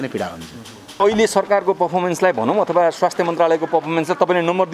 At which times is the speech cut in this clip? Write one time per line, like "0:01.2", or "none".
0:01.0